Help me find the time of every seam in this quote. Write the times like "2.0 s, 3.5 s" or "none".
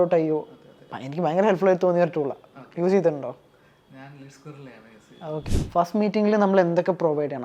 5.4 s

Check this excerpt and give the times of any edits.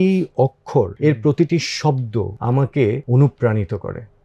0.9 s, 2.3 s, 3.0 s

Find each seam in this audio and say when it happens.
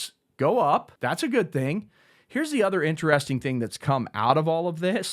0.9 s

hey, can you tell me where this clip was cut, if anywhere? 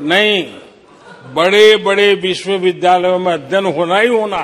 none

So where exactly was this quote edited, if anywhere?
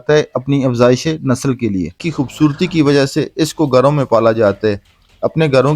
2.0 s

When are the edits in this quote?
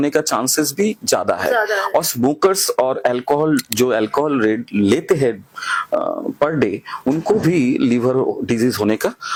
none

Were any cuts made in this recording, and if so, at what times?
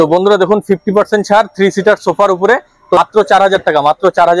3.0 s

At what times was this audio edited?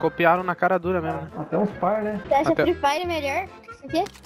2.2 s

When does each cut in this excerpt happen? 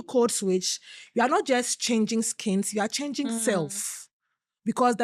none

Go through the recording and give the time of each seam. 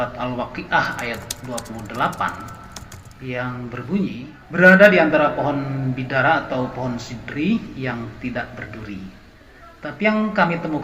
4.3 s

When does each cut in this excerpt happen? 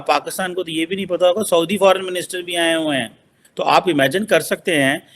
3.4 s

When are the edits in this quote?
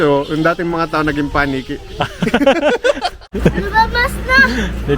3.2 s

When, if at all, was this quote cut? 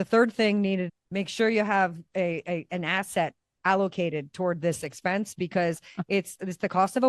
0.9 s

